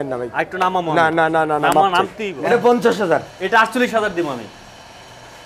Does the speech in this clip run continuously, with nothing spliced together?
no; 1 cut; at 2.2 s

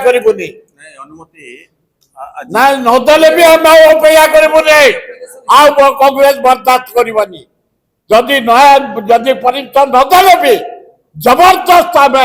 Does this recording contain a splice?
no; 0 cuts

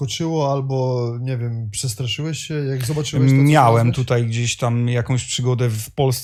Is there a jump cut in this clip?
no; 0 cuts

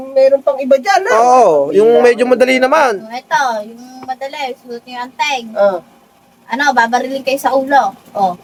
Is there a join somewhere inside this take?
no; 0 cuts

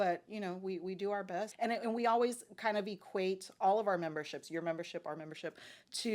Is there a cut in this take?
yes; 1 cut; at 1.5 s

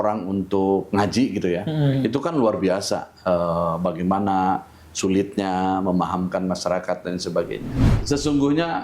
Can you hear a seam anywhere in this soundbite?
yes; 1 cut; at 7.9 s

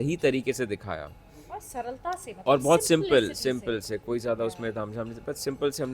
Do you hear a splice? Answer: no; 0 cuts

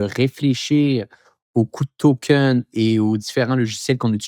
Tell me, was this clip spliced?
no; 0 cuts

